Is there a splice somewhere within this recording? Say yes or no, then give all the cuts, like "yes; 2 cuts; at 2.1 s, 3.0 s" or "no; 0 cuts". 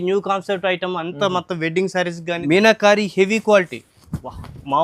yes; 1 cut; at 2.4 s